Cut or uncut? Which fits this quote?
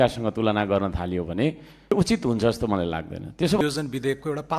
cut